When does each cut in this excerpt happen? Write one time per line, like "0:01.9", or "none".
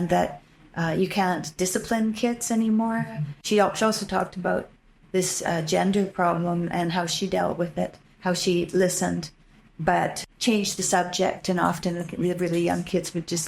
0:03.4
0:10.2